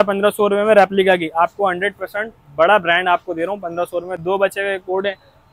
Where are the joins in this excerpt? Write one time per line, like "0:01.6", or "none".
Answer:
none